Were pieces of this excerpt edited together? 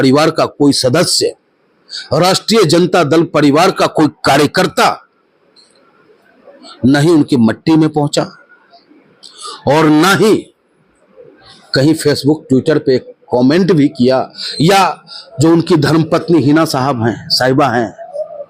no; 0 cuts

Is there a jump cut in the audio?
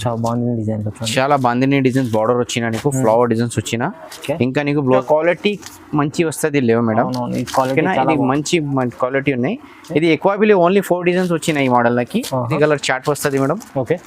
yes; 2 cuts; at 5.0 s, 12.5 s

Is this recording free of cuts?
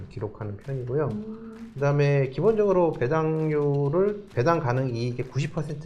no; 1 cut; at 4.3 s

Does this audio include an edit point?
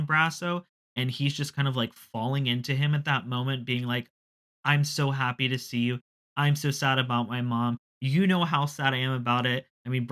no; 0 cuts

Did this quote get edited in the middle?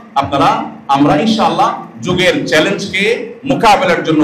no; 0 cuts

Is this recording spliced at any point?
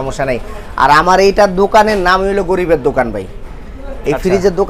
no; 0 cuts

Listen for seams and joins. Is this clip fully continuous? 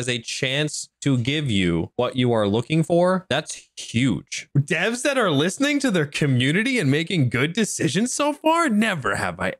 no; 1 cut; at 4.4 s

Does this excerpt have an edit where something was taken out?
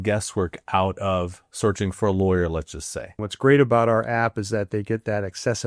yes; 1 cut; at 3.3 s

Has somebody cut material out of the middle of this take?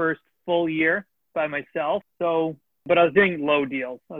yes; 1 cut; at 2.8 s

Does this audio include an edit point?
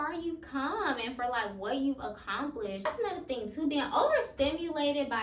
yes; 1 cut; at 2.9 s

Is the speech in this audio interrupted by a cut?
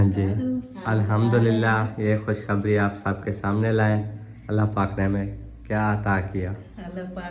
no; 0 cuts

